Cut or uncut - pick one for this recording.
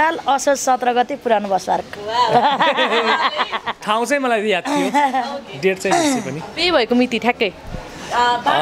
uncut